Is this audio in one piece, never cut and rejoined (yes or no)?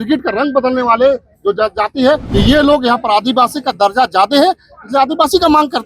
no